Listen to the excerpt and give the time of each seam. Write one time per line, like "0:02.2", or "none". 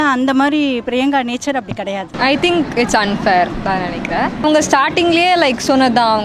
0:02.0